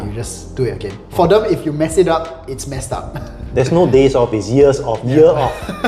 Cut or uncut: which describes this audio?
uncut